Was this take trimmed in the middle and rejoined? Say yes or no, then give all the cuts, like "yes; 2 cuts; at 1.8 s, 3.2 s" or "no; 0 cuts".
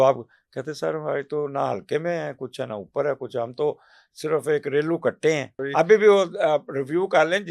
yes; 1 cut; at 5.6 s